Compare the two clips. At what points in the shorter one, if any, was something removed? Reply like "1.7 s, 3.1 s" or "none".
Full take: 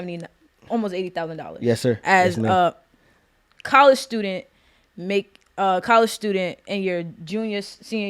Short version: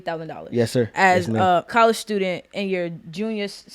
1.7 s